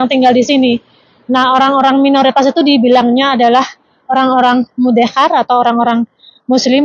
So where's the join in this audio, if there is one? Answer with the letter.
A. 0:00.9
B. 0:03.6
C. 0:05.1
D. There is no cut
D